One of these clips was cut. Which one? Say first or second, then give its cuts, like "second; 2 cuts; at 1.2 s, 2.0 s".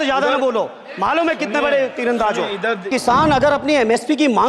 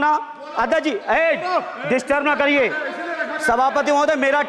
first; 1 cut; at 2.9 s